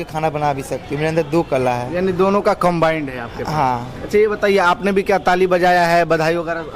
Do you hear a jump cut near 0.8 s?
no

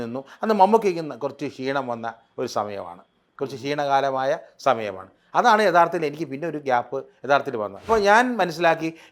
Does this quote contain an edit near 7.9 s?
yes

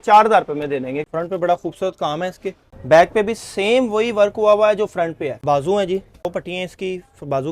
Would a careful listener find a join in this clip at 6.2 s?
yes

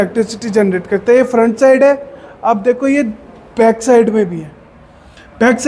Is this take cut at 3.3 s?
no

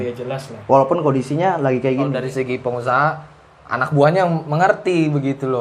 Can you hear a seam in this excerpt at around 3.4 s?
no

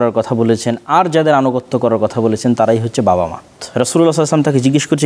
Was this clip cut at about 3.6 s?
yes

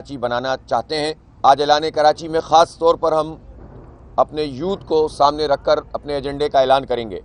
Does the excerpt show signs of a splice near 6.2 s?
no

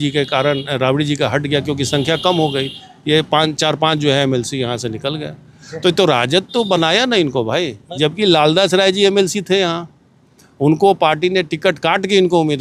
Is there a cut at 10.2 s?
no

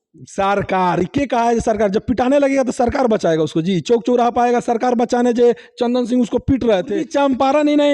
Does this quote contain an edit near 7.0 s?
yes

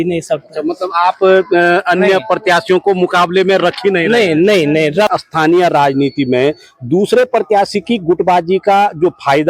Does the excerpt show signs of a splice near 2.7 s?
no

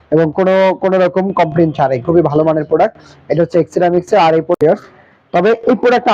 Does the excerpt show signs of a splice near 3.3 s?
no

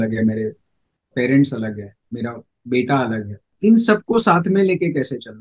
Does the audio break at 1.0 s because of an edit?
no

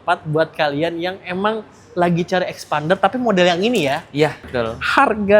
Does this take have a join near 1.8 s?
no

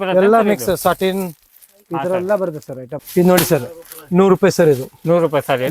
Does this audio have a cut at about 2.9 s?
yes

